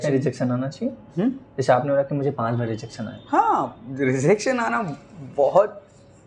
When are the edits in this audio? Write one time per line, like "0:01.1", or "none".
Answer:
none